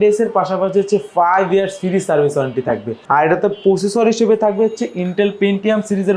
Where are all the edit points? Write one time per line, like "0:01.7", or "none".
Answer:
0:02.9